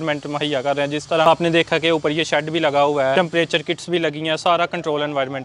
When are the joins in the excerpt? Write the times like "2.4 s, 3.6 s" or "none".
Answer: 1.3 s, 3.1 s